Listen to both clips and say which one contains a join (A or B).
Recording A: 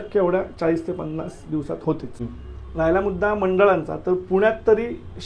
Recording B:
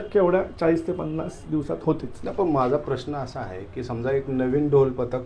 A